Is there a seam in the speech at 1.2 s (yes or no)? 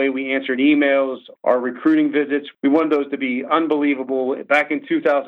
yes